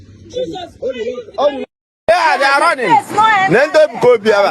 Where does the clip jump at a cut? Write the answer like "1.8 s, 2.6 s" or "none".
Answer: none

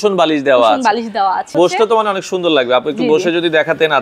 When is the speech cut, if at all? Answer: 1.5 s

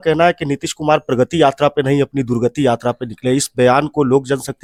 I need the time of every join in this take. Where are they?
none

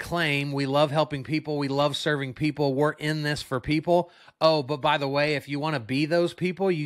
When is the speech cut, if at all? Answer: none

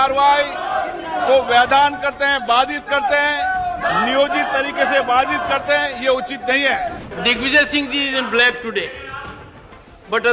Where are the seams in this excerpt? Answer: 7.1 s

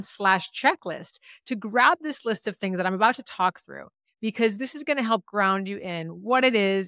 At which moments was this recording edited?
none

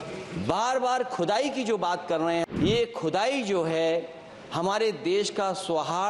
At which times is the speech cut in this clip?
2.5 s

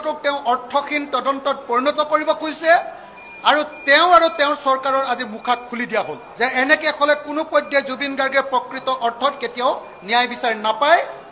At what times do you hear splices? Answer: 6.3 s

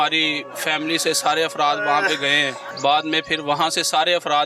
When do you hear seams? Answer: 2.7 s

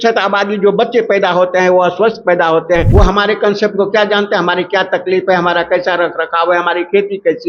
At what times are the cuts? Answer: 2.9 s

